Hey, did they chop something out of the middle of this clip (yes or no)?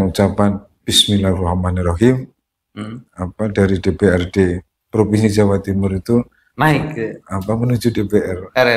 no